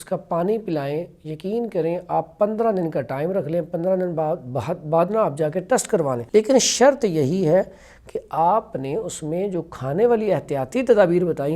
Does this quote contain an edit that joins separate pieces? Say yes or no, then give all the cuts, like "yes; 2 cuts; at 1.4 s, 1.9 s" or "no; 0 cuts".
yes; 1 cut; at 6.2 s